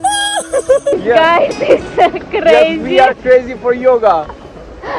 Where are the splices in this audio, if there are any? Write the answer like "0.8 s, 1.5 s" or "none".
0.9 s